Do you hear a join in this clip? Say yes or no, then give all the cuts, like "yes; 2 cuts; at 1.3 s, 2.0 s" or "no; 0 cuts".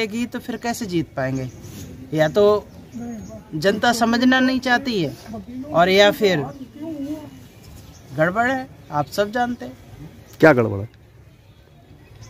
no; 0 cuts